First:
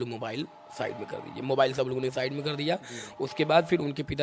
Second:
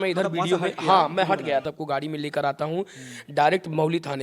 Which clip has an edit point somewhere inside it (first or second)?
second